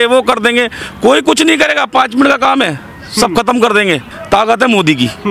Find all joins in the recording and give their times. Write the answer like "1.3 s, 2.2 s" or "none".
4.1 s